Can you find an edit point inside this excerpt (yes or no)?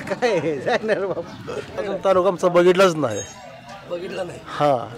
yes